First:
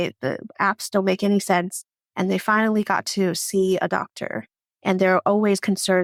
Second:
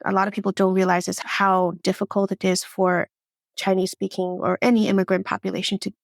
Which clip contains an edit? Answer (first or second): second